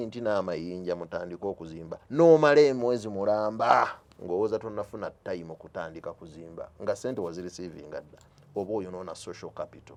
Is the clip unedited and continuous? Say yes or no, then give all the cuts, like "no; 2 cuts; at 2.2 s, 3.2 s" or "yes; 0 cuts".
yes; 0 cuts